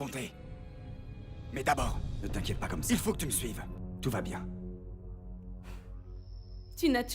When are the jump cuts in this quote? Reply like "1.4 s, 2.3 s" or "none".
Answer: 5.1 s